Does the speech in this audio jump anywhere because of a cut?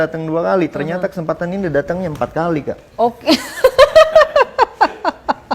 no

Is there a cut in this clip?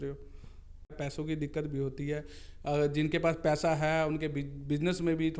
yes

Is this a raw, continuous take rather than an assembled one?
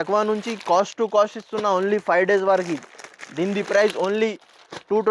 yes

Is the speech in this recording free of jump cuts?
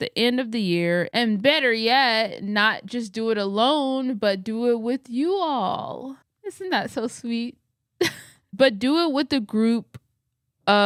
yes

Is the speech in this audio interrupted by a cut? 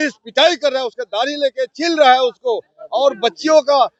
no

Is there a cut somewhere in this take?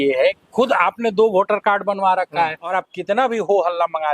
yes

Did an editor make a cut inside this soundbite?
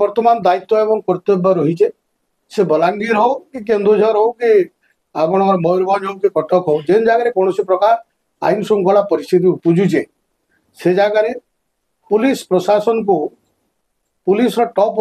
no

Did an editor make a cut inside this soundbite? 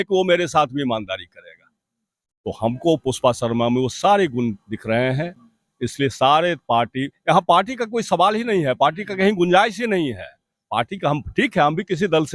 no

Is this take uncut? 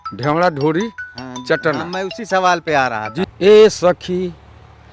no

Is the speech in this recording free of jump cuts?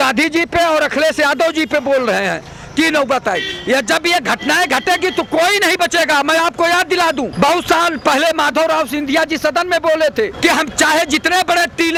yes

